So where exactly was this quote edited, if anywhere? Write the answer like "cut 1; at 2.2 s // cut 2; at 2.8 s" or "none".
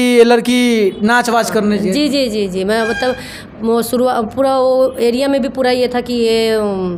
none